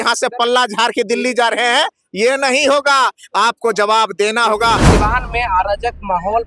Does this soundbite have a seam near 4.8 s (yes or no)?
yes